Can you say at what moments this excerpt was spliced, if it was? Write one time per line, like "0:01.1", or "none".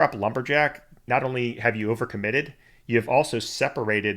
0:01.0

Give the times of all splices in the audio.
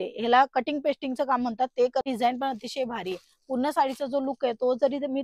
0:02.0

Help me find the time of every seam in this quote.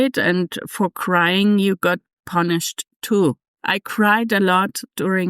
0:03.5

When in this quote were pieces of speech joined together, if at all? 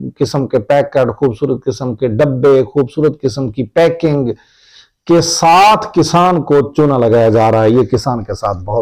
none

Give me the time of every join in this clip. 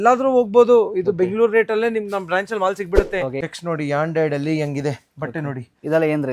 0:03.4

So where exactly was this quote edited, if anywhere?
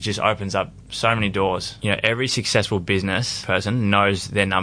0:01.7
0:03.3

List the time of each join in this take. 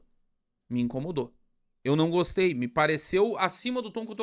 none

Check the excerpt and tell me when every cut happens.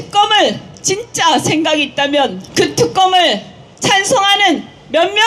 0:02.4

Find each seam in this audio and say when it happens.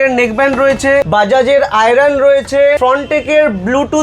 0:01.1
0:02.8

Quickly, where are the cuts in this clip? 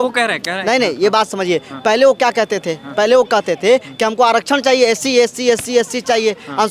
none

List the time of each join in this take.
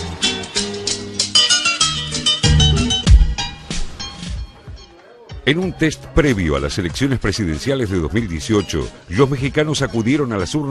0:07.0

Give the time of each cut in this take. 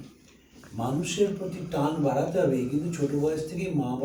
none

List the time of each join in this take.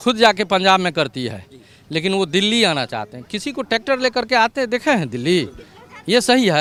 none

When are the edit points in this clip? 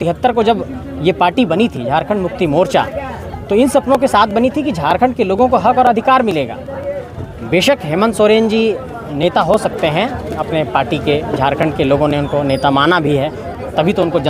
none

